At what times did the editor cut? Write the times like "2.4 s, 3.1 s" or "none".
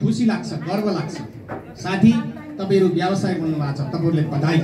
none